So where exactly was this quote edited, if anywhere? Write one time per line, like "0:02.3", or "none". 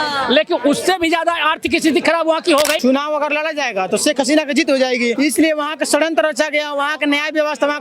0:02.8
0:05.1

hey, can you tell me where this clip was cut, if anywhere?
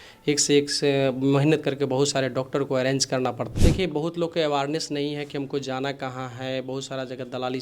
0:03.4

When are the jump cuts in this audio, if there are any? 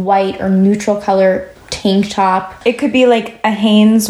0:01.6
0:02.5

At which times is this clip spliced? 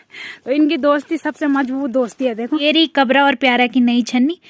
0:02.6

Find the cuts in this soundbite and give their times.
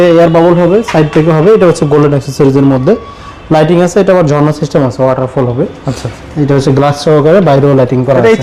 none

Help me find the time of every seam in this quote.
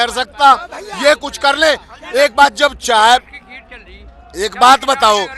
none

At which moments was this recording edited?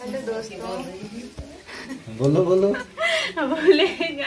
none

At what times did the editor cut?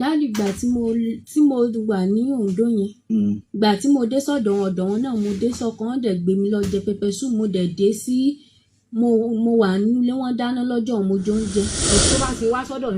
0:11.9

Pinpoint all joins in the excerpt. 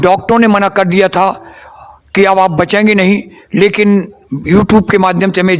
none

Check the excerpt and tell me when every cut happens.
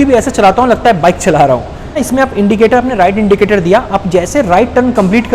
0:02.0

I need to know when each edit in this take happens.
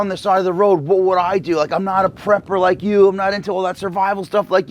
none

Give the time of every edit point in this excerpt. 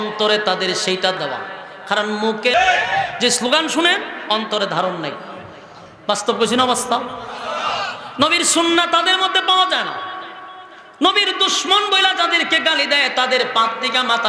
0:01.2
0:02.5

